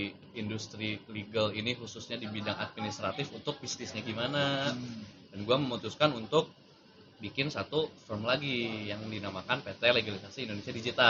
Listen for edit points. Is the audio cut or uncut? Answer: uncut